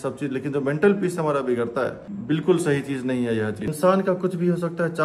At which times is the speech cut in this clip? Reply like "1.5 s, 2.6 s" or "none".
2.1 s, 3.7 s

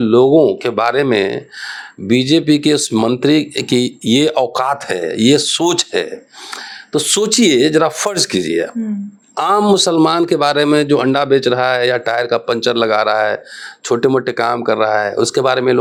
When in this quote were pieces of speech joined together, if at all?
none

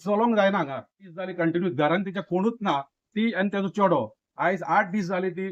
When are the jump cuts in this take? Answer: 1.2 s

